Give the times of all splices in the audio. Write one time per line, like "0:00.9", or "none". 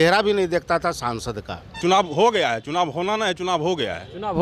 0:01.8